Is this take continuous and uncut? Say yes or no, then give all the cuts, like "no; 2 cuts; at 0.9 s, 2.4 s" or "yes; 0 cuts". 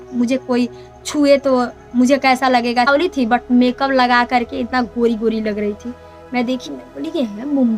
no; 1 cut; at 2.9 s